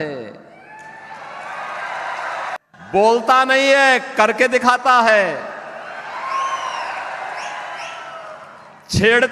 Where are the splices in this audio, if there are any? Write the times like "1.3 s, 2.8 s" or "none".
2.6 s

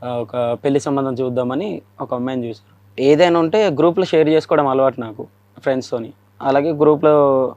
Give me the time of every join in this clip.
2.8 s, 6.3 s

